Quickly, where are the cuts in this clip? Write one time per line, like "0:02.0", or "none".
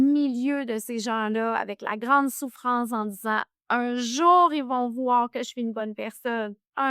none